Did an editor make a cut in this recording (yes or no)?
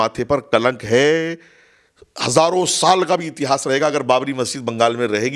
no